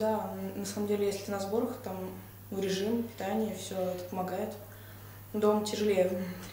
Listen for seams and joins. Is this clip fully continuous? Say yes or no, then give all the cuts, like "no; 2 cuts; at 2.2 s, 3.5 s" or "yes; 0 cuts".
yes; 0 cuts